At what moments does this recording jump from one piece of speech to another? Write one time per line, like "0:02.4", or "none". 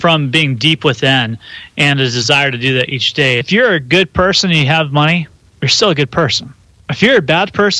0:03.4